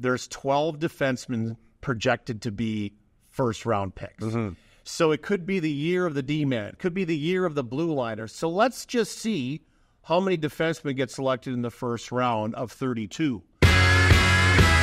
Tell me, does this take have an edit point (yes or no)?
yes